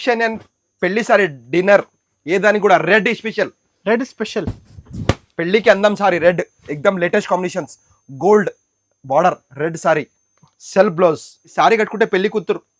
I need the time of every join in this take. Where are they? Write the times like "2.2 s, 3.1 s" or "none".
11.4 s

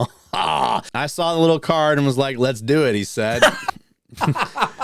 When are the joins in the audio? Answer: 0.9 s

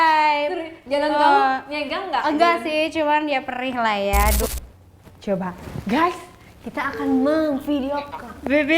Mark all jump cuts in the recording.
4.5 s

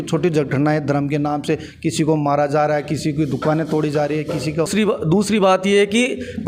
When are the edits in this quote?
4.7 s

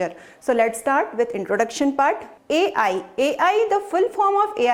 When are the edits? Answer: 2.3 s

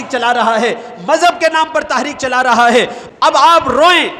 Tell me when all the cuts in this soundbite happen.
3.0 s

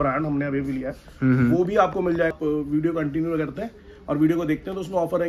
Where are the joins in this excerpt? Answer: 2.3 s

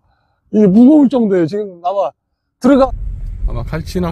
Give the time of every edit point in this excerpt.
2.8 s

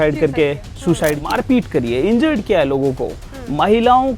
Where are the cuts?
1.2 s

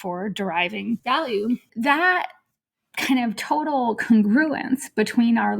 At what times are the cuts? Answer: 1.0 s, 1.7 s

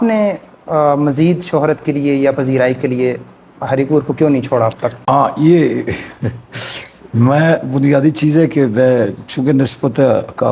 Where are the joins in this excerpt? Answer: none

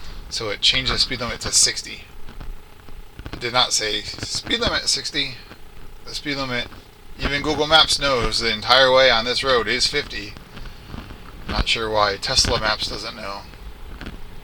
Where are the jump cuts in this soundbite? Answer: none

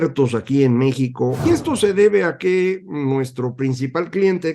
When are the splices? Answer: 1.4 s

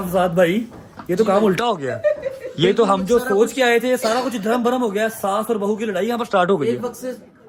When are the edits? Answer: none

